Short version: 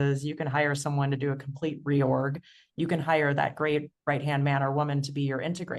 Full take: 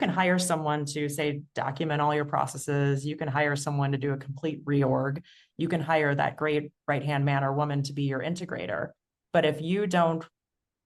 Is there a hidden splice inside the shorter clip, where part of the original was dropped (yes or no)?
no